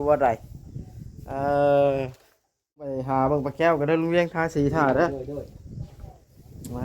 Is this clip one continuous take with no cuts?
no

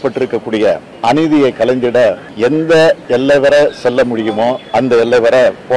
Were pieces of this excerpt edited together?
yes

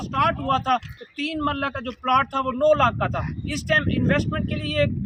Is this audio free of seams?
yes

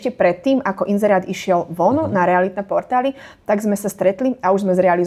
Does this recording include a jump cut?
no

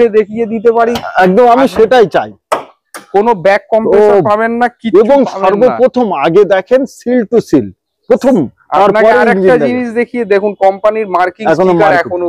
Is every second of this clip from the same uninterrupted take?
yes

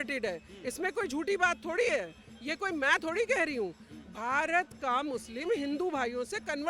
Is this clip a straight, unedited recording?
yes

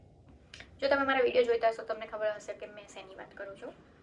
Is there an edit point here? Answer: no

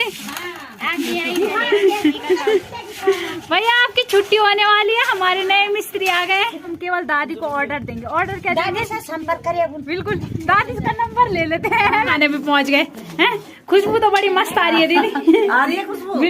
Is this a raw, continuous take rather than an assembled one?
no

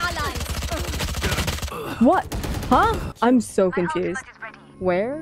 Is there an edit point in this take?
yes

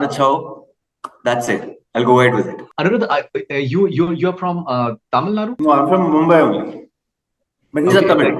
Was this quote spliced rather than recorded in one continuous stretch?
no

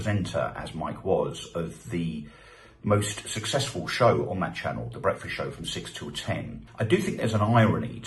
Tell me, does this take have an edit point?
yes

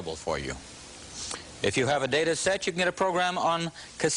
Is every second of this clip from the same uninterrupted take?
yes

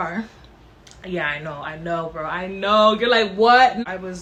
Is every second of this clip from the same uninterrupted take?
yes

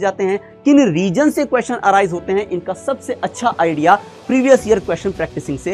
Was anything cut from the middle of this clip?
no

